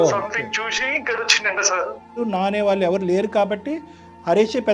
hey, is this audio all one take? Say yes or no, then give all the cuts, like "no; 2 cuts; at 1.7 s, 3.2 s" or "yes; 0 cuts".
no; 1 cut; at 2.2 s